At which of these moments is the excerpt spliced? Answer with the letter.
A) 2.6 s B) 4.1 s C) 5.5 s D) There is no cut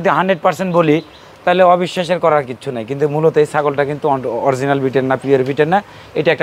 D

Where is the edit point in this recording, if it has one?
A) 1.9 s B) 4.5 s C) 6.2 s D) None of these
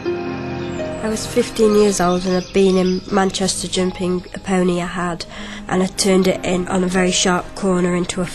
A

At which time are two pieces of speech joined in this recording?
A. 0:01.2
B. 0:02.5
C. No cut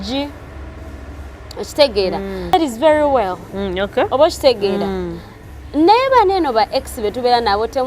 B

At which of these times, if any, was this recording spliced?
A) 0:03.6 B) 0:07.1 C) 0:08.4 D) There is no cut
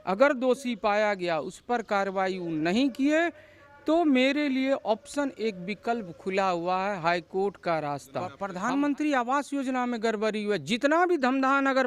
C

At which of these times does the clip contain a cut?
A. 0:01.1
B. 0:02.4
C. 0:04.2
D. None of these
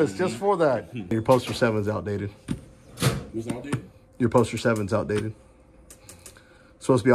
A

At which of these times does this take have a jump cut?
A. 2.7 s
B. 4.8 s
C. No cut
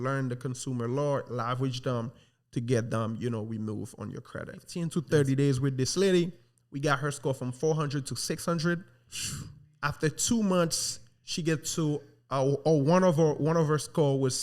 B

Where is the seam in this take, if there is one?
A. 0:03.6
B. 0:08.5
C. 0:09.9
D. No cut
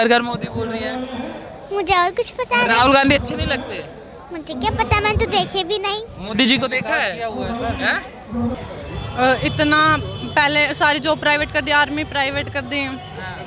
B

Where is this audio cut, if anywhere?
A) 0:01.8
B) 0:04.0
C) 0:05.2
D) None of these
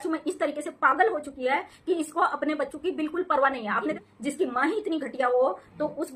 B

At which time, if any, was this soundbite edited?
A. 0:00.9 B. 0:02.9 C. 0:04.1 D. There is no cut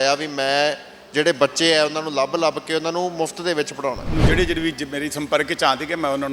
C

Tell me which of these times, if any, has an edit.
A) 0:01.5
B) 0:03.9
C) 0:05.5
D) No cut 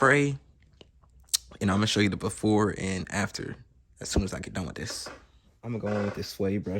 C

